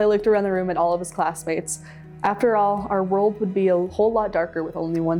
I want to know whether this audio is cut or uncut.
uncut